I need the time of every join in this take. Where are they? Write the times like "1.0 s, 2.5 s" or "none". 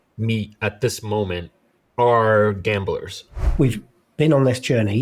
3.4 s